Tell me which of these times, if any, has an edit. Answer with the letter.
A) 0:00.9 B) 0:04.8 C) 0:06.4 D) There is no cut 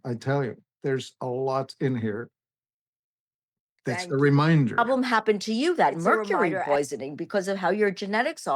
B